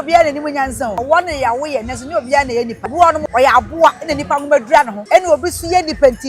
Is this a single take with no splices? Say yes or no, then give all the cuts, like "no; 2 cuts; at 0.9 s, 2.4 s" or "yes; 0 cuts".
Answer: no; 3 cuts; at 1.0 s, 3.1 s, 5.0 s